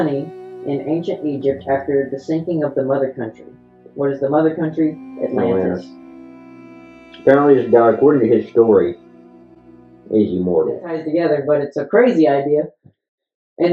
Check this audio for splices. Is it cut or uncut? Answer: cut